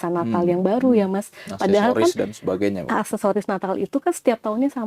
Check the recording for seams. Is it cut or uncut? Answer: uncut